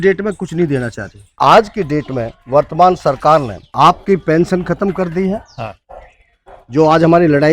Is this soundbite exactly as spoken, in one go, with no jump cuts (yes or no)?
no